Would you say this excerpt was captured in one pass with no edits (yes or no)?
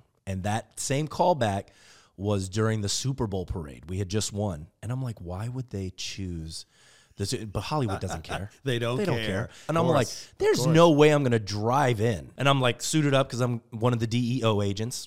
no